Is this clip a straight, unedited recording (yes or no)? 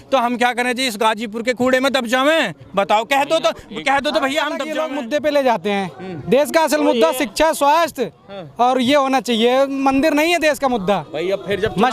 no